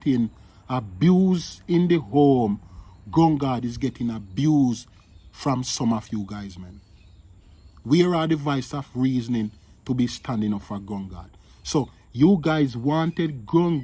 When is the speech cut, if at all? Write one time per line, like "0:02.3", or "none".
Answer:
none